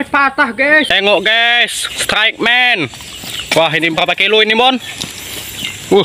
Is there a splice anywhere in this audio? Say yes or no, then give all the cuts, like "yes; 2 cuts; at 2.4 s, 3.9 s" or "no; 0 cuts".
yes; 1 cut; at 0.9 s